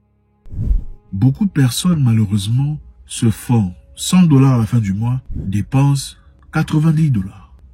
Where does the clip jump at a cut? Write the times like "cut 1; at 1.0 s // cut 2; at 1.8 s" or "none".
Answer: cut 1; at 1.1 s